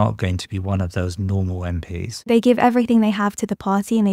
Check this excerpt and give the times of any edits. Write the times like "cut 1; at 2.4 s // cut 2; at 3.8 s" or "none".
cut 1; at 2.3 s